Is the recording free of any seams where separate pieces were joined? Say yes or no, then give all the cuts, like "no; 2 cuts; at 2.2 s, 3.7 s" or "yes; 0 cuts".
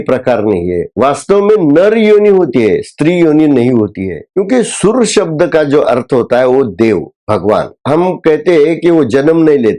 no; 2 cuts; at 4.2 s, 7.8 s